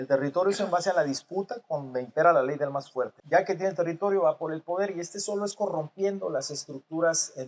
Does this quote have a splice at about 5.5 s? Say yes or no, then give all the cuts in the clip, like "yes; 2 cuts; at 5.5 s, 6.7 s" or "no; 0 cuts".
no; 1 cut; at 3.2 s